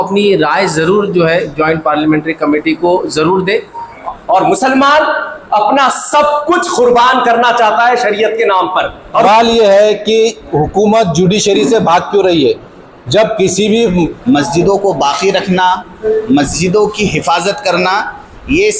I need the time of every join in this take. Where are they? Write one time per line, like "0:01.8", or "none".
0:04.0
0:09.2
0:14.2